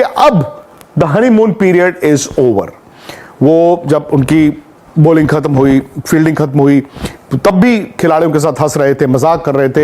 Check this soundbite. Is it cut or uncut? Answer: uncut